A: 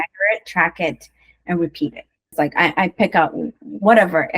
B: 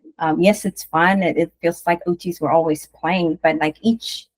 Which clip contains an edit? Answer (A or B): A